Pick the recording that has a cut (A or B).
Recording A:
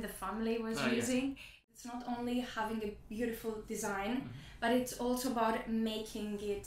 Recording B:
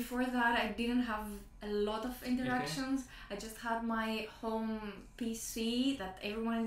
A